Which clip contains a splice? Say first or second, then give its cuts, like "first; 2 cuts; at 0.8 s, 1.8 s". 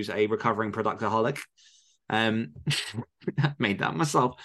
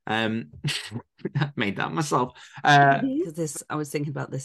second; 1 cut; at 3.4 s